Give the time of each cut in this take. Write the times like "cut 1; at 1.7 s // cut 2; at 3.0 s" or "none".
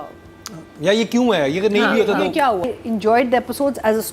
cut 1; at 2.6 s